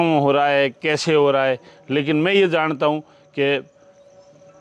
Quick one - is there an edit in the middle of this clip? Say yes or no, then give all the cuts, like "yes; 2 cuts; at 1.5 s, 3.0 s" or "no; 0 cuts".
no; 0 cuts